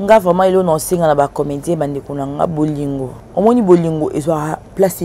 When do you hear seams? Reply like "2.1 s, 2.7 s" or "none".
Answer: 3.2 s